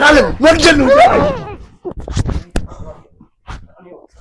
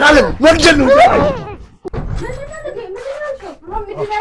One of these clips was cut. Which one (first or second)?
second